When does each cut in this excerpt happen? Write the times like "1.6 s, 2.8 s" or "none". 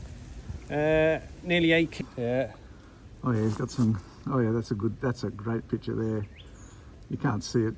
2.0 s